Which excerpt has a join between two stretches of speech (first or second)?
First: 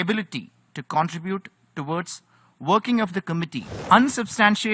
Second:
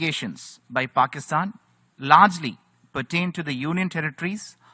first